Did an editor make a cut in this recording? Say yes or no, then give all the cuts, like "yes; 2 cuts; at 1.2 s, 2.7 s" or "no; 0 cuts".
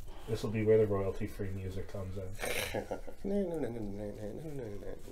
yes; 1 cut; at 3.3 s